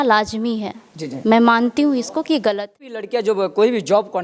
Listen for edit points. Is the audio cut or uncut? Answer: cut